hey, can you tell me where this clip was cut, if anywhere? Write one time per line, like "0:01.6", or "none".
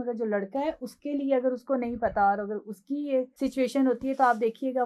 0:03.3